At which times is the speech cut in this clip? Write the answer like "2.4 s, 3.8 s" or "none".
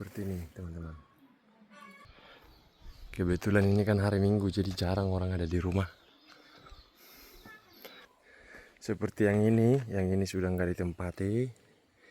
2.1 s, 8.1 s